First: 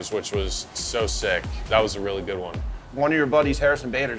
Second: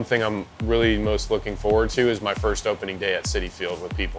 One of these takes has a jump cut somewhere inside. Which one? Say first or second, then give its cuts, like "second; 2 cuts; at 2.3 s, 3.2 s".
first; 2 cuts; at 1.7 s, 2.8 s